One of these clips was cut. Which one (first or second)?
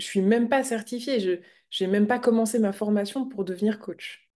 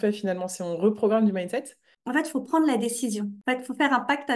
second